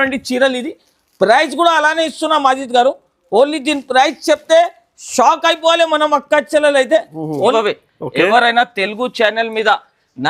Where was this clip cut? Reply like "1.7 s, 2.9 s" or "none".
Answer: 7.5 s